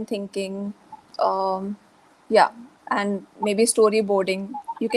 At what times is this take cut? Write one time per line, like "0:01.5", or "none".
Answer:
none